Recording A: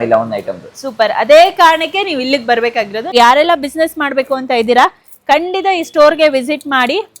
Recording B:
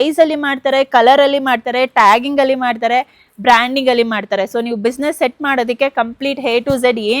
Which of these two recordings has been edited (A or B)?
A